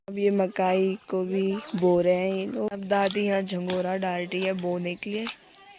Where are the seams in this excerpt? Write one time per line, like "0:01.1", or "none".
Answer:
0:02.7